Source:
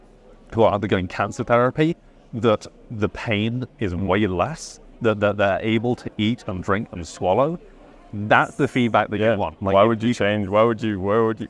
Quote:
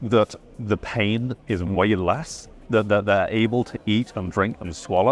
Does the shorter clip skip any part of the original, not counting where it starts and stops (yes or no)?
no